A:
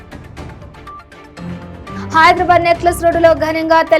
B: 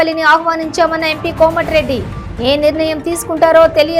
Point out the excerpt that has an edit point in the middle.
A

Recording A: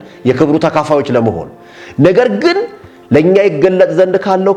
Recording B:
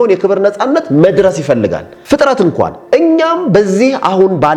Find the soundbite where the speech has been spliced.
B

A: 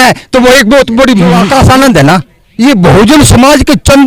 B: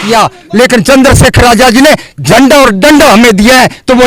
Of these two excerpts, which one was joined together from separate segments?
A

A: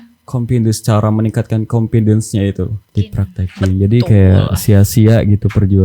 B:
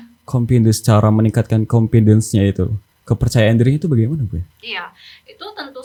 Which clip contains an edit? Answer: A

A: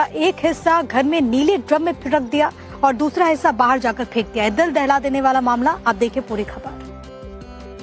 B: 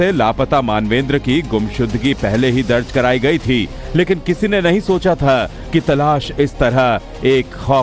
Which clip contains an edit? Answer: B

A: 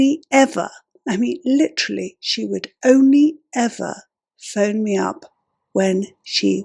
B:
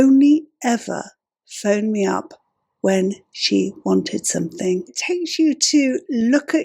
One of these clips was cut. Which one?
B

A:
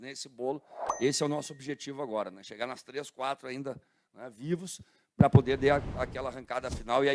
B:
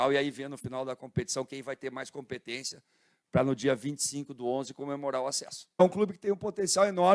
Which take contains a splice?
B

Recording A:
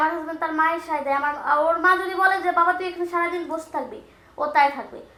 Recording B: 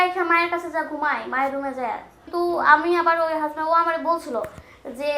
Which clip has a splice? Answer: B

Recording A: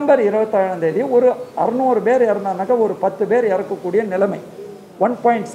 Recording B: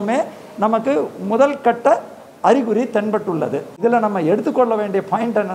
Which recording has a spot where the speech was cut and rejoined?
B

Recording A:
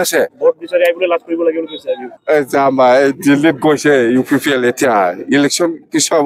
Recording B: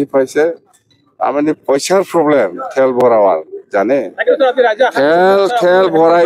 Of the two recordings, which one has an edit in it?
A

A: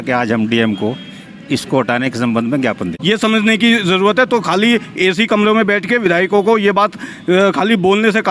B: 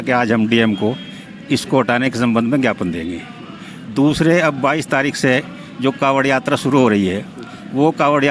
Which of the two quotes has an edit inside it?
A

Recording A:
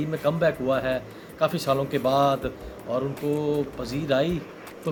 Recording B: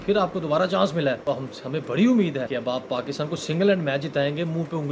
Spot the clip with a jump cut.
B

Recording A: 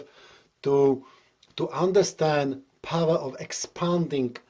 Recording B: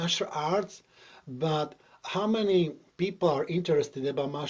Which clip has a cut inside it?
B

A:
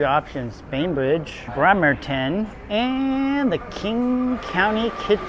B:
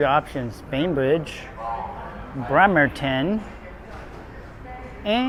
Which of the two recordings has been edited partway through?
A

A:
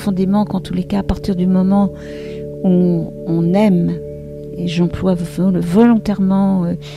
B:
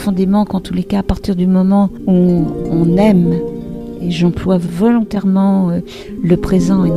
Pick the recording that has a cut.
B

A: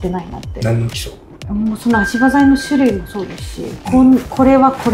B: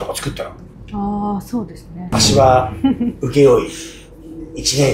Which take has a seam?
B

